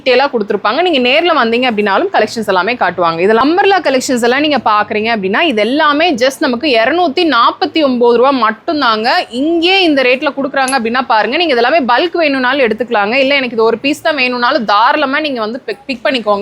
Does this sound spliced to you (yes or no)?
yes